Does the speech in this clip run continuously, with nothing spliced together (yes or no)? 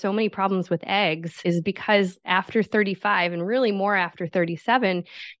no